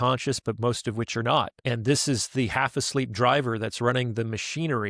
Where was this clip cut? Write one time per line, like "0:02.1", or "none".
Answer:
0:01.6